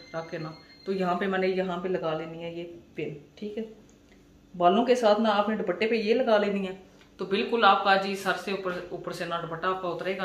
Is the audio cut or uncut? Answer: uncut